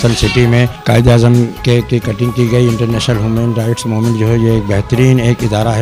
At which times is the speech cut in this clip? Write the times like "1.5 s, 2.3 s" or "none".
none